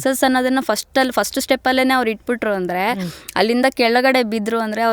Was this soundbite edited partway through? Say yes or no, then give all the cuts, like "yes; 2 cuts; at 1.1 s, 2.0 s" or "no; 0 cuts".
no; 0 cuts